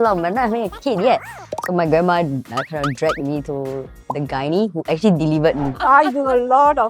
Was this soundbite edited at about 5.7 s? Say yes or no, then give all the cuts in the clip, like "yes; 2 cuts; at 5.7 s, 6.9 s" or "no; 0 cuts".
yes; 1 cut; at 5.7 s